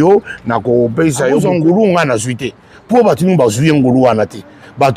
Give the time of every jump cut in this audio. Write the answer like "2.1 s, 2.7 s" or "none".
1.4 s

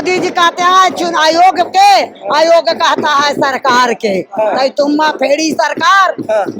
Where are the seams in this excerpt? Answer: none

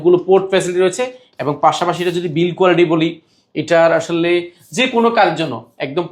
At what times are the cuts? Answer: none

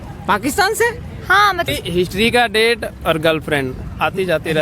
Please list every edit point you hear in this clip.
1.7 s

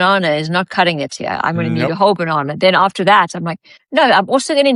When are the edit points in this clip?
none

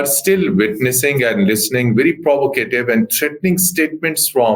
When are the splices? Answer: none

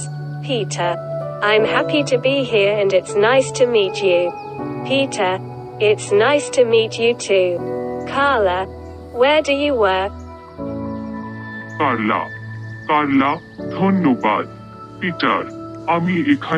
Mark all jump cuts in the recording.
10.3 s, 11.6 s

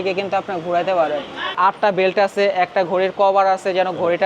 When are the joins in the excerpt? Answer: 1.5 s

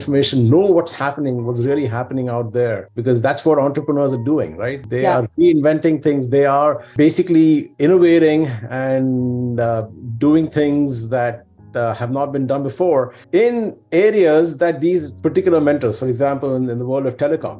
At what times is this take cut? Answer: none

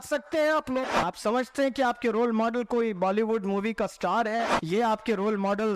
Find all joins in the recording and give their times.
1.0 s, 4.6 s

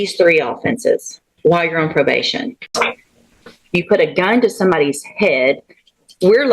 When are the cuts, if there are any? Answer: 2.7 s

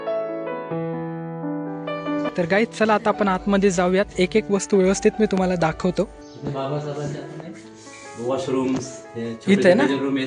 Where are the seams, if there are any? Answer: 2.3 s, 6.2 s

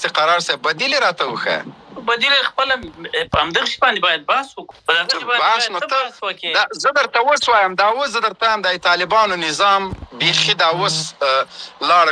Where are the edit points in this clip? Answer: 4.6 s

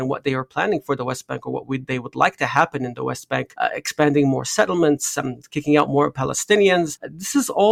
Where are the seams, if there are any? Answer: none

